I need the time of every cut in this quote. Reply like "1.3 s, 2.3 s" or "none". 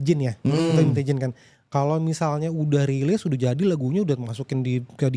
none